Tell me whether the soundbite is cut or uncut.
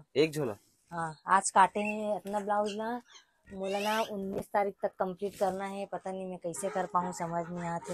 uncut